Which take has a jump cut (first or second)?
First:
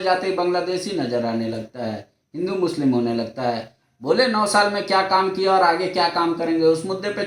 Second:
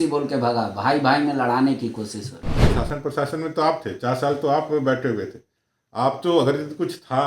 second